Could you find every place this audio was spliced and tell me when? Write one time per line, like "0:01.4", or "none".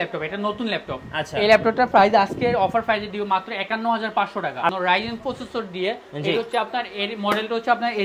0:04.7